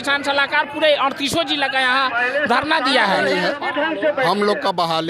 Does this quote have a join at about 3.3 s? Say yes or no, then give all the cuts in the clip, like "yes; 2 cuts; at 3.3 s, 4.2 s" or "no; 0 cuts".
yes; 1 cut; at 3.3 s